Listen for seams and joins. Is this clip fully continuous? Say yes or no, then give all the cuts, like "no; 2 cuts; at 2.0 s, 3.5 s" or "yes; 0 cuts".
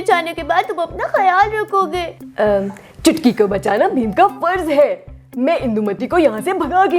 no; 1 cut; at 2.2 s